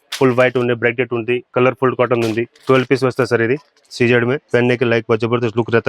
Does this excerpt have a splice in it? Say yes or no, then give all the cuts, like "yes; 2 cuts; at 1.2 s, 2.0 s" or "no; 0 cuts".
yes; 4 cuts; at 1.5 s, 2.6 s, 3.8 s, 4.4 s